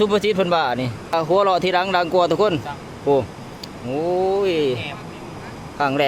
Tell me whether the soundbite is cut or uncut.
cut